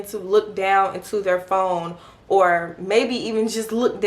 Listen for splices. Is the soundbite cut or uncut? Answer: uncut